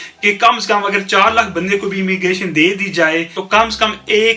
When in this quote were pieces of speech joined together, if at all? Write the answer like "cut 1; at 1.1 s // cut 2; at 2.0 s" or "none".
cut 1; at 3.4 s